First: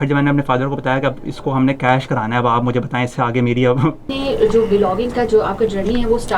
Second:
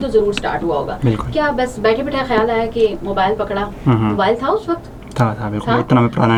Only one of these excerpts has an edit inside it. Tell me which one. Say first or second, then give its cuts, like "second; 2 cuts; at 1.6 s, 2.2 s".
first; 1 cut; at 4.1 s